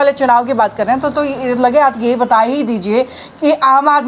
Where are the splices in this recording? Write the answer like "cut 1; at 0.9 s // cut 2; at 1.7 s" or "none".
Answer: none